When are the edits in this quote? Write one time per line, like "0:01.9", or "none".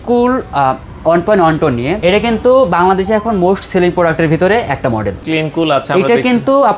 0:01.9
0:05.2